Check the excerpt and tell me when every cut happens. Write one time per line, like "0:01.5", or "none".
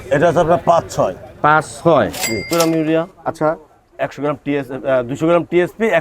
0:02.5

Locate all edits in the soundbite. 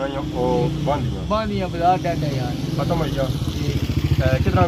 none

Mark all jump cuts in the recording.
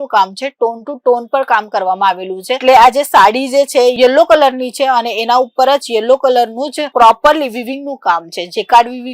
0:02.6

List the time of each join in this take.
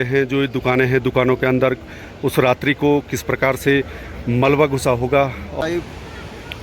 0:05.6

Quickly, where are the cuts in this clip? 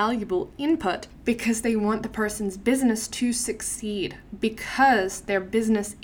0:01.1

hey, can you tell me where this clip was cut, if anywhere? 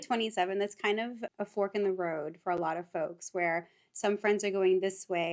0:01.2

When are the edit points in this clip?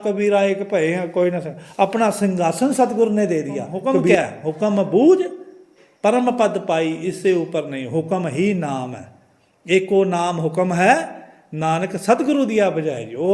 0:04.1

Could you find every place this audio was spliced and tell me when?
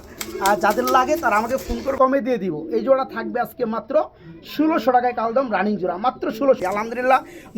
0:01.9
0:06.6

